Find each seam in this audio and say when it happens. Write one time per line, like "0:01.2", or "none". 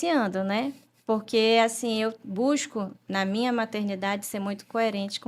none